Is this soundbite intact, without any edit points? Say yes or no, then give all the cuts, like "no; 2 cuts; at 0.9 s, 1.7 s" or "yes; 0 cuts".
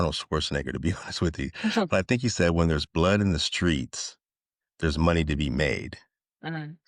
yes; 0 cuts